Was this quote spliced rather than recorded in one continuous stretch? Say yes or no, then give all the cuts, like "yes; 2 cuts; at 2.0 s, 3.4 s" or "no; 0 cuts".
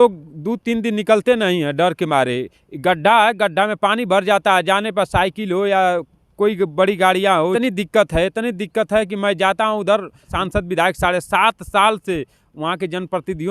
yes; 2 cuts; at 7.5 s, 10.4 s